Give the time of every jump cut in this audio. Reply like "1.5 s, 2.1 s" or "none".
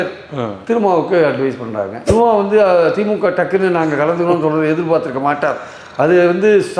2.0 s